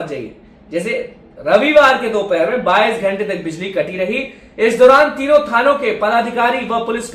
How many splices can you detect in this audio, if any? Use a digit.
0